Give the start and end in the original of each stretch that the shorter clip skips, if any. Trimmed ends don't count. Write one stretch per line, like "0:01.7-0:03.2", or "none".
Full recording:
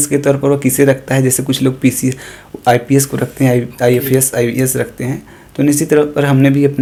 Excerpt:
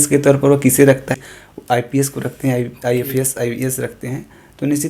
0:01.1-0:02.1